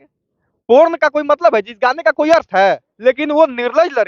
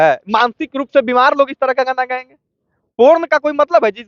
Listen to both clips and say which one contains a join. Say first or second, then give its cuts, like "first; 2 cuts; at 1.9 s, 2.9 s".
first; 1 cut; at 2.9 s